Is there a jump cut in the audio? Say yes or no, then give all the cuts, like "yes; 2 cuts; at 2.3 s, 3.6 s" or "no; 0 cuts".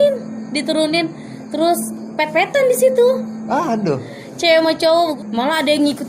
yes; 1 cut; at 5.1 s